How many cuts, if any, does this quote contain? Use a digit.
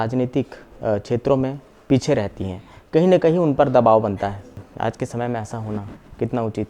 1